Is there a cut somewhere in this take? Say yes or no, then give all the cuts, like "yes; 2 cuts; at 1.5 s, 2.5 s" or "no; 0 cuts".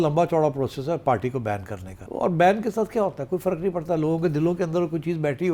yes; 1 cut; at 2.0 s